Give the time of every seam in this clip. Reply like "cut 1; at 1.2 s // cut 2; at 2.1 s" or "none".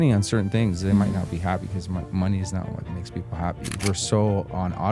cut 1; at 3.8 s